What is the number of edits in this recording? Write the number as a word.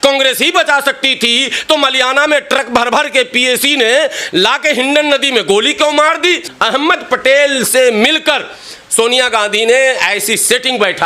one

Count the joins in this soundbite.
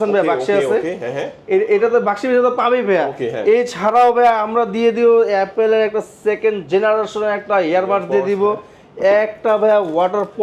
zero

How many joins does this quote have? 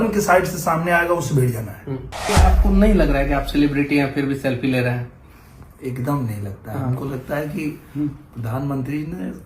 one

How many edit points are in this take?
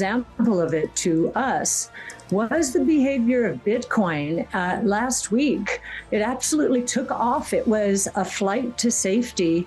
zero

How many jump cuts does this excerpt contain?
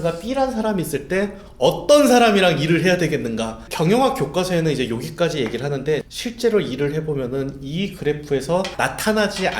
three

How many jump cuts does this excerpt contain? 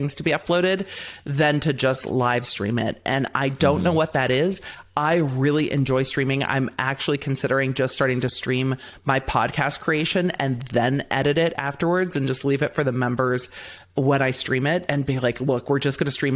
zero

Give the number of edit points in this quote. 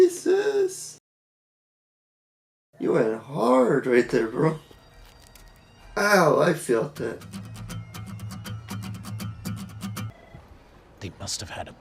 one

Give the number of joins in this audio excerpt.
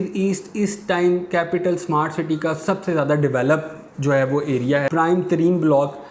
one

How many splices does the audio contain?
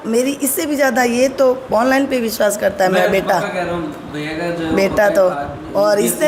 zero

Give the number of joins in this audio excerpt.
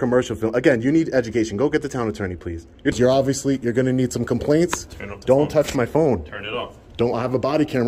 one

